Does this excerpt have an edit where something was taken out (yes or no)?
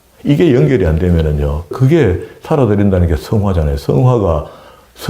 yes